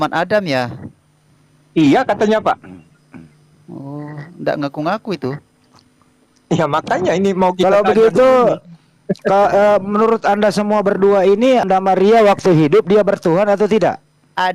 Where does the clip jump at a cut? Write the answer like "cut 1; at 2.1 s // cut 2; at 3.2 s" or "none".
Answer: cut 1; at 11.7 s

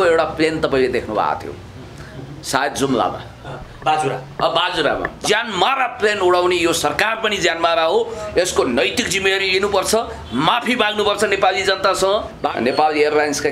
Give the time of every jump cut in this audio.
cut 1; at 5.1 s // cut 2; at 12.4 s

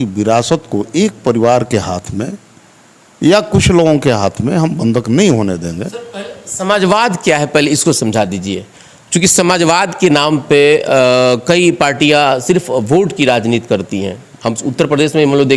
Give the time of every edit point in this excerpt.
none

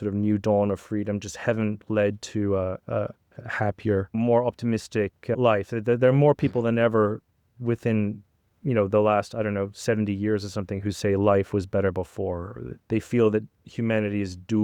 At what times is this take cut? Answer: cut 1; at 4.1 s // cut 2; at 5.3 s // cut 3; at 12.7 s

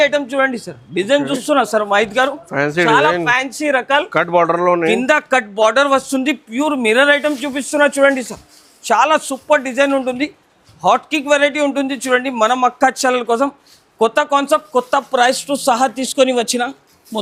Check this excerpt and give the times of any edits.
none

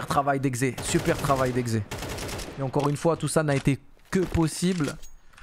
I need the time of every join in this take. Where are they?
none

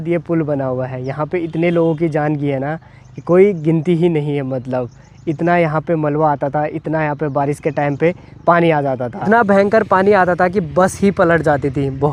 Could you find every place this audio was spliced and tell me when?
none

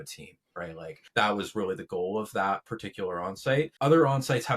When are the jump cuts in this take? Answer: cut 1; at 1.0 s // cut 2; at 3.7 s

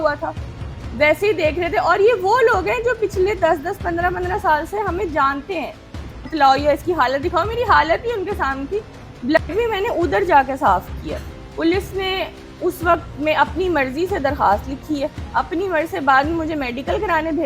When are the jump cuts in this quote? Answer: cut 1; at 6.3 s // cut 2; at 11.4 s

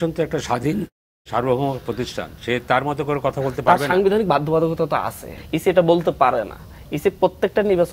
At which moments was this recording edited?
cut 1; at 5.4 s

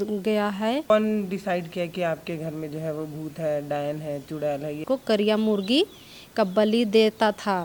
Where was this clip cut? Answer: cut 1; at 0.9 s // cut 2; at 4.8 s

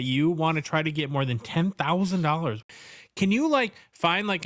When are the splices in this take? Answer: cut 1; at 2.7 s

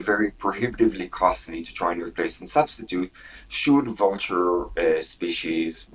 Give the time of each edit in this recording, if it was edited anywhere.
none

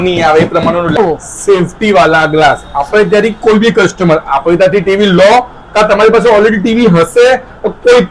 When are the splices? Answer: cut 1; at 1.0 s

